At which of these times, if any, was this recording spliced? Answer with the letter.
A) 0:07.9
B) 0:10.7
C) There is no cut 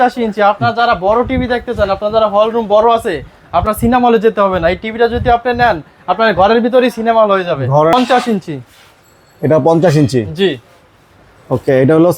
A